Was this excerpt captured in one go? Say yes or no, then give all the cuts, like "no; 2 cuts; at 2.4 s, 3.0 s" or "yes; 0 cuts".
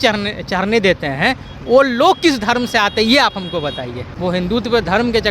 no; 1 cut; at 4.1 s